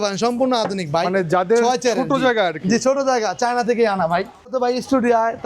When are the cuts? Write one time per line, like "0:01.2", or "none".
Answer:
0:04.5